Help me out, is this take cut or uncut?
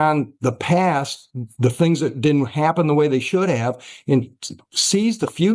uncut